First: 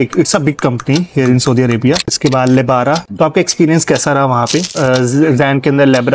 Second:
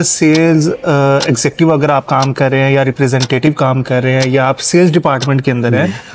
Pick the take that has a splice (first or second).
first